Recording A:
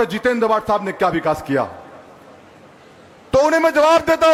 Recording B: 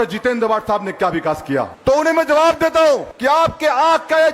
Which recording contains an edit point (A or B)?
B